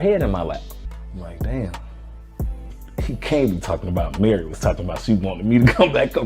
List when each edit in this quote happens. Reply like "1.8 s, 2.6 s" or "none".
1.0 s, 2.7 s